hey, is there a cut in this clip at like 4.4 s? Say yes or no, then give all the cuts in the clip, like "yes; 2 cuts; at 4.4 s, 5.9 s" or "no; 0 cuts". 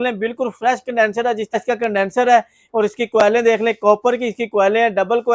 no; 1 cut; at 1.6 s